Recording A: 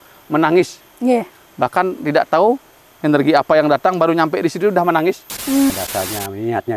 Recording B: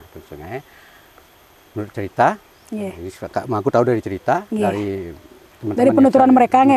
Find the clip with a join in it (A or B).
A